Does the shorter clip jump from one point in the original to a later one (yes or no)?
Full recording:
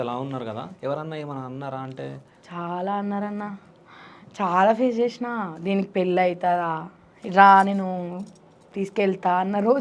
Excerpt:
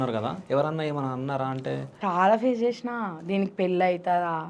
yes